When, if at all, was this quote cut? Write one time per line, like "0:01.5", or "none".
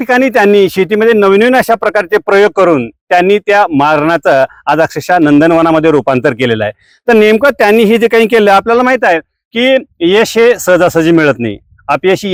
none